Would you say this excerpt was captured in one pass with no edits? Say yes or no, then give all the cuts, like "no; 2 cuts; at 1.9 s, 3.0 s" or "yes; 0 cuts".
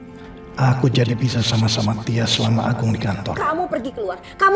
no; 1 cut; at 3.4 s